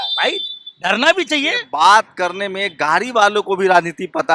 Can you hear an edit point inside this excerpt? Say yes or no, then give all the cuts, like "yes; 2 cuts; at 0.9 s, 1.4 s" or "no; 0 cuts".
yes; 1 cut; at 1.7 s